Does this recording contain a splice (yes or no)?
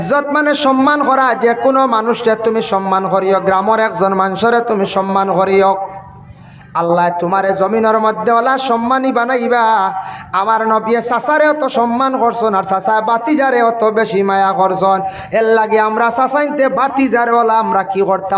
no